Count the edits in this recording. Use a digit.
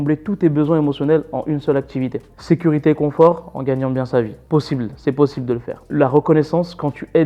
0